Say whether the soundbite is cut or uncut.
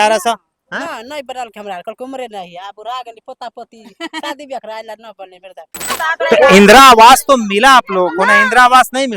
cut